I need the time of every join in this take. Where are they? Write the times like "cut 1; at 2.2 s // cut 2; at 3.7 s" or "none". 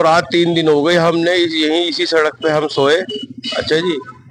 none

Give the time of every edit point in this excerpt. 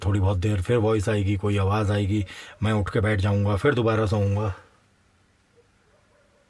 none

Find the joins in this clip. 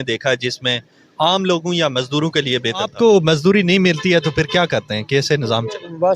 cut 1; at 2.9 s

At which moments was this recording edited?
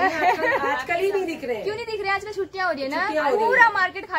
none

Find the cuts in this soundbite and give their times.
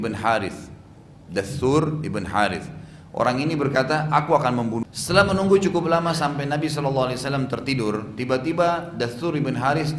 cut 1; at 4.9 s

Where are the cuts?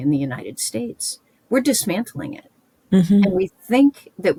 none

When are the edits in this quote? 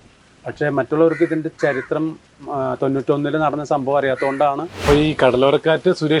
cut 1; at 4.8 s

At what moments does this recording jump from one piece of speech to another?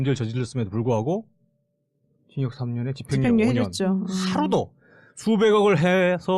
cut 1; at 5.1 s

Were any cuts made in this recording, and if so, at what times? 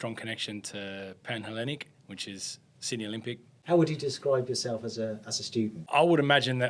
cut 1; at 3.5 s // cut 2; at 5.8 s

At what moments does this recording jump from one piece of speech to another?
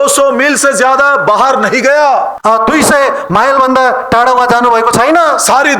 cut 1; at 2.3 s

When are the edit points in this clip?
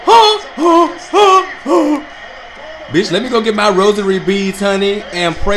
none

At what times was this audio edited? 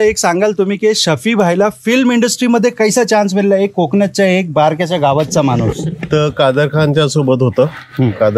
none

